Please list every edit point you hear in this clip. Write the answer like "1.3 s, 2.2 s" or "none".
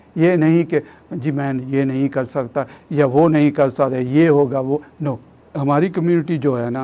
5.6 s